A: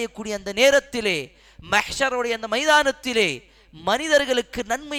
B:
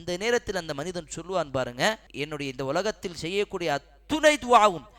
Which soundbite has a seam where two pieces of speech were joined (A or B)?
B